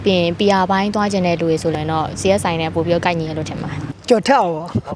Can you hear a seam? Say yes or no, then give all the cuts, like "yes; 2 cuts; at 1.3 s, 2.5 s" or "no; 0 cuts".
yes; 2 cuts; at 1.7 s, 3.9 s